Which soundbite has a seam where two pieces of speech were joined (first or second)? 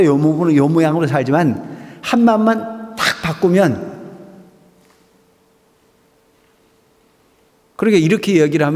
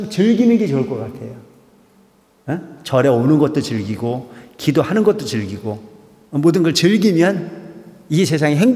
first